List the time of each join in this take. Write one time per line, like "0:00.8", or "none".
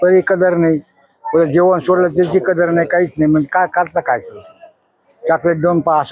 none